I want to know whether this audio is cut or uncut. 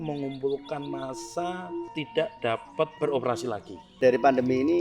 cut